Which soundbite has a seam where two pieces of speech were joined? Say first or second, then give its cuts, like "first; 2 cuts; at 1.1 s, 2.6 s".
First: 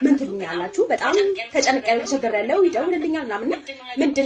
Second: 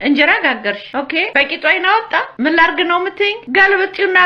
second; 3 cuts; at 1.2 s, 2.3 s, 3.4 s